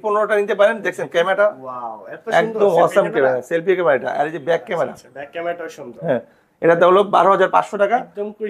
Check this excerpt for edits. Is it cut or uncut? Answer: uncut